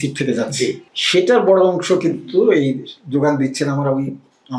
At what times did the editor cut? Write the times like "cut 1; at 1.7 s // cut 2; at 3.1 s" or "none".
cut 1; at 0.9 s